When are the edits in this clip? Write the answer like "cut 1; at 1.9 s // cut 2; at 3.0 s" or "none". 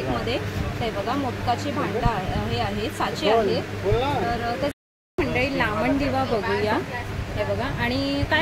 none